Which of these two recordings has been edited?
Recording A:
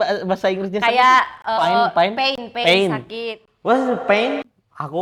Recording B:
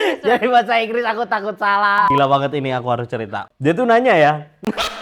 B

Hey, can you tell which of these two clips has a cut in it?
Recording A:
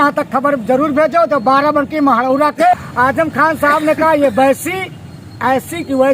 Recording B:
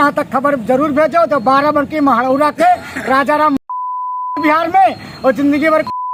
A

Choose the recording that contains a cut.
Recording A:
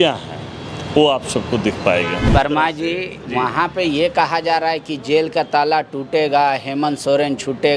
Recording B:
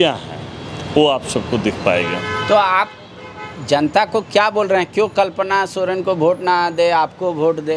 A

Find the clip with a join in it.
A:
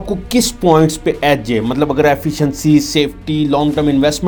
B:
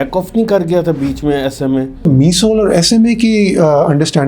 B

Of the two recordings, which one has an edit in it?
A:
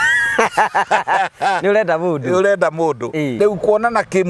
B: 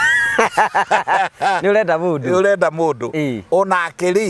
A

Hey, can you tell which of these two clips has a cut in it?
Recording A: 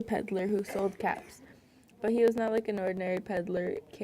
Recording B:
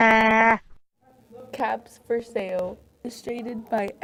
A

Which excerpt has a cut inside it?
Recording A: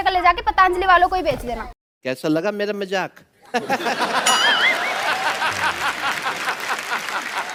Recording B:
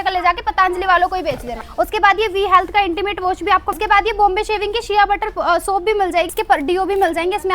B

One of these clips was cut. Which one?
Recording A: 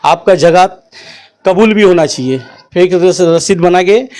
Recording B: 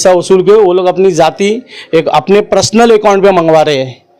A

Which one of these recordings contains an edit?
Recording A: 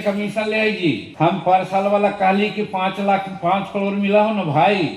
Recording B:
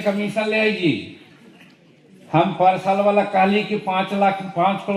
A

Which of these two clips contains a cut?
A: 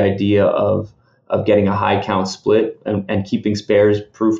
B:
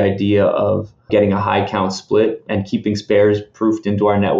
B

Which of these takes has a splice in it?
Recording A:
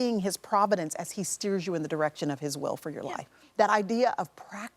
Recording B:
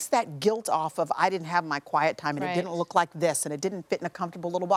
A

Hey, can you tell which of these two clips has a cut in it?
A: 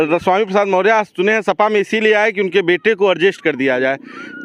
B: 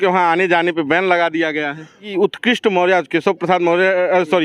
B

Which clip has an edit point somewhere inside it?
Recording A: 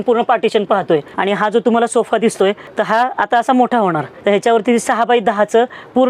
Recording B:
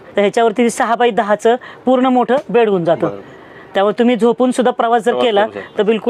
A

